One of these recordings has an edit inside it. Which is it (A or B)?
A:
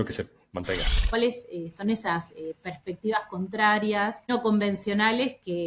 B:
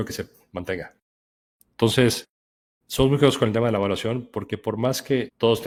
A